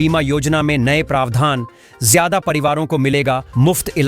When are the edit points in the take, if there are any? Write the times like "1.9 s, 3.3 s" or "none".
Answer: none